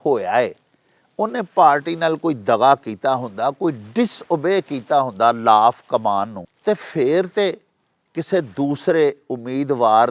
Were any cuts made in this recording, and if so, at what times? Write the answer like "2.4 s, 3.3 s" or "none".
6.4 s